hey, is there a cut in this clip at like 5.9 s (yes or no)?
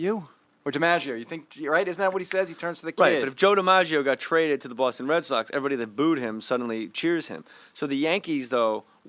no